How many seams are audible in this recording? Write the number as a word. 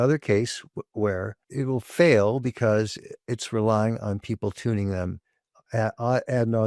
one